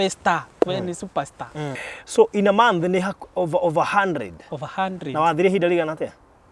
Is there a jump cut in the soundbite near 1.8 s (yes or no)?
yes